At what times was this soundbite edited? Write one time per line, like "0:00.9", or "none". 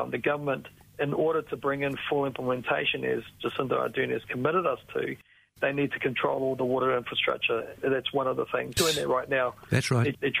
0:08.8